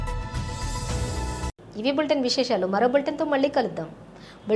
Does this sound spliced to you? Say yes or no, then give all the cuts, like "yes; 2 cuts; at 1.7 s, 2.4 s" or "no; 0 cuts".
no; 0 cuts